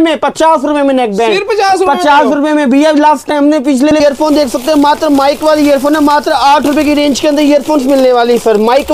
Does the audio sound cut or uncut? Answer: cut